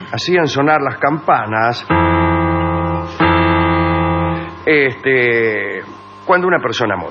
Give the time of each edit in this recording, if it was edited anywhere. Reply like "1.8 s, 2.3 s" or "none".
4.5 s